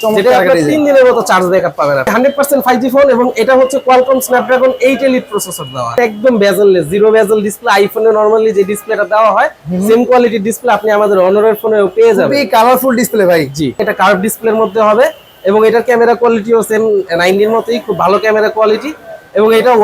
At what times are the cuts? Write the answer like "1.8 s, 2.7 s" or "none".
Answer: 2.1 s, 6.0 s, 13.8 s